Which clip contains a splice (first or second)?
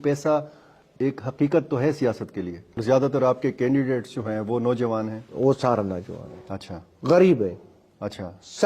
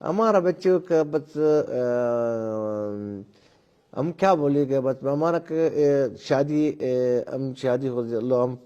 first